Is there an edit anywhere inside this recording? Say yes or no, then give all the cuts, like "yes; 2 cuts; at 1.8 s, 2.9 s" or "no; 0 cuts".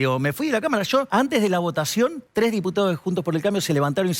yes; 2 cuts; at 1.1 s, 2.2 s